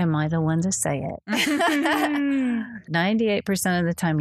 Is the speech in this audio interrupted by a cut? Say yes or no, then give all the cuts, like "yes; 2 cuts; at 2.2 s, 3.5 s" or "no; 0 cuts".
yes; 1 cut; at 2.9 s